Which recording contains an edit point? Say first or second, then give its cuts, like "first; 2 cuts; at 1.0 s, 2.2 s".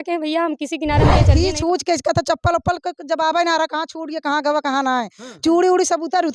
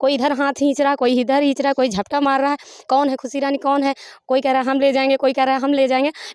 first; 1 cut; at 1.3 s